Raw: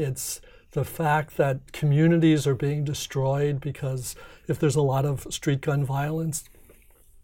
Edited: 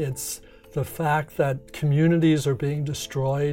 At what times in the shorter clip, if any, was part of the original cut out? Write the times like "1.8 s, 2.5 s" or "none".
none